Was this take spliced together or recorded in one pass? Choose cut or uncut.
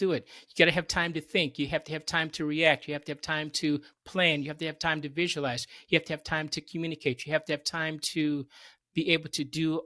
uncut